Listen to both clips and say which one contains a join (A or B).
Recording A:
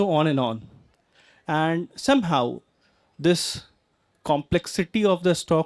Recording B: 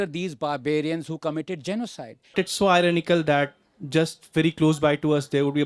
B